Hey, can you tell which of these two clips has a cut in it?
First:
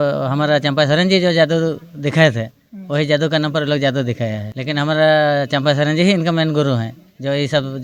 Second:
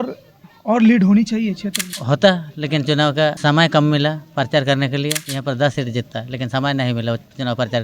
second; 3 cuts; at 1.9 s, 3.4 s, 5.3 s

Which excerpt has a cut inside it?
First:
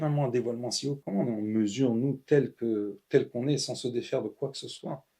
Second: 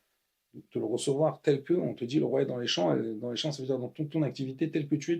first; 1 cut; at 1.0 s

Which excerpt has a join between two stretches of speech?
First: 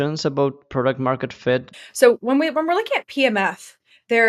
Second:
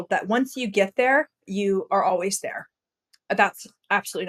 first; 1 cut; at 1.7 s

